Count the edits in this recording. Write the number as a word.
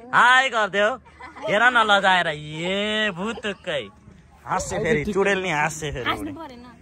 zero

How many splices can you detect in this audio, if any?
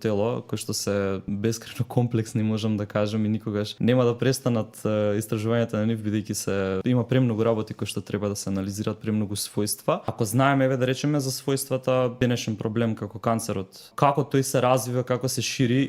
six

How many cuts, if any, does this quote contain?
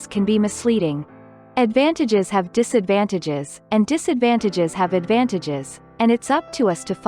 zero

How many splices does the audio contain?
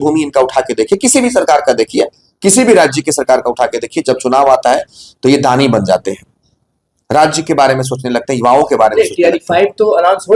zero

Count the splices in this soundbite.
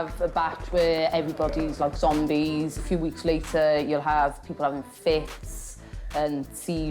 one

